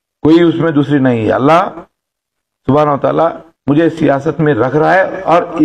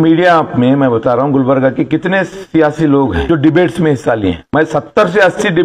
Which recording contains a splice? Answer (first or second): second